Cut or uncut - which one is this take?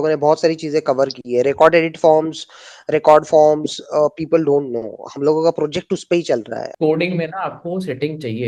cut